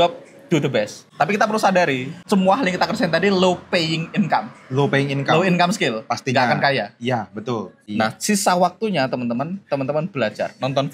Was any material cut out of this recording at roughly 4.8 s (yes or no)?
no